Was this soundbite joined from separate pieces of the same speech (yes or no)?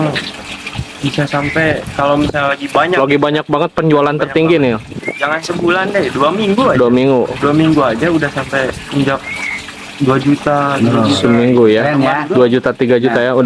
no